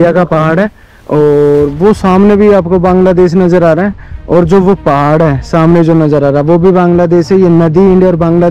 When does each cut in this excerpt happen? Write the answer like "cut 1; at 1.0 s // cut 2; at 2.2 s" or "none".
none